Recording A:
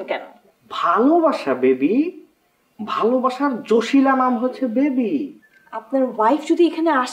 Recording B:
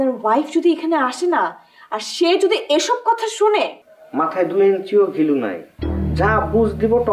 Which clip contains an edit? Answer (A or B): B